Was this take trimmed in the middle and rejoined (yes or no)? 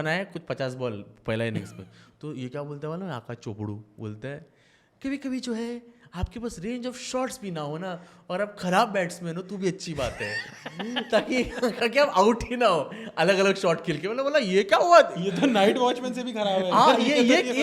no